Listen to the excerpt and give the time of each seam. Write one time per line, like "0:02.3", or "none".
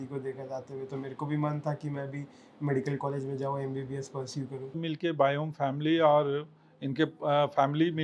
0:04.8